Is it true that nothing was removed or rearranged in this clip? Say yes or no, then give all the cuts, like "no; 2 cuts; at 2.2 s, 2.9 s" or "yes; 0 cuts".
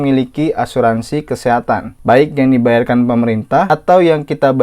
no; 2 cuts; at 1.9 s, 3.7 s